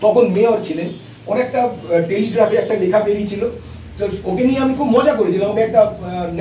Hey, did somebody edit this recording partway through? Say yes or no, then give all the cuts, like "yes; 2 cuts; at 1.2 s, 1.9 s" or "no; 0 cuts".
no; 0 cuts